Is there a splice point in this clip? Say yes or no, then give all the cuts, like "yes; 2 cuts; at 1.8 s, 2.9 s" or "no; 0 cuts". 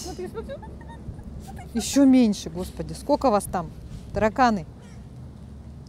no; 0 cuts